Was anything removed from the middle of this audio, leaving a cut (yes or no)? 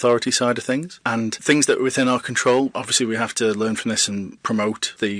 yes